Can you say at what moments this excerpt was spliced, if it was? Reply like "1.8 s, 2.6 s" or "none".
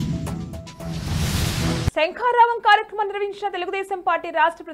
1.9 s